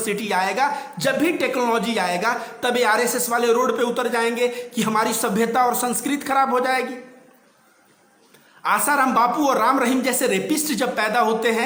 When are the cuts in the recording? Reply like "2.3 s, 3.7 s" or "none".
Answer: none